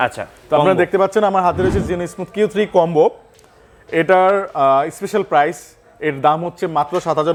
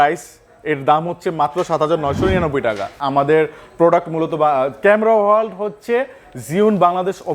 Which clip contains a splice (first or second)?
second